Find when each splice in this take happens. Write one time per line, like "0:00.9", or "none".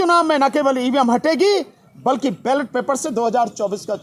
none